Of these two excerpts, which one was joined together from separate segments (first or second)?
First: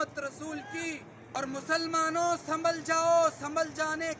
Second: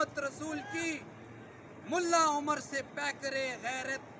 first